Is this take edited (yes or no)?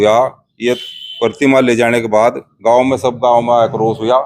no